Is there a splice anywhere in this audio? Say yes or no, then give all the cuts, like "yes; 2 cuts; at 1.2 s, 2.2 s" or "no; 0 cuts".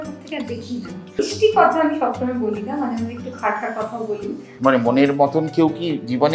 yes; 2 cuts; at 1.3 s, 4.5 s